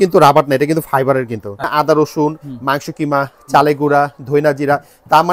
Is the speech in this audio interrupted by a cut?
yes; 1 cut; at 1.6 s

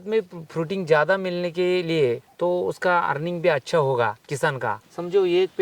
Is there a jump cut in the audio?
yes; 2 cuts; at 2.3 s, 4.5 s

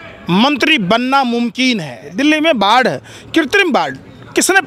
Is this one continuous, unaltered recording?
no; 1 cut; at 2.0 s

